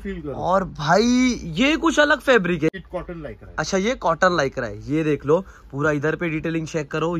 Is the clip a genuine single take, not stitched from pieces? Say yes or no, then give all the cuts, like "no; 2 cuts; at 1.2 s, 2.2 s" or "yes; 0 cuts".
no; 1 cut; at 2.7 s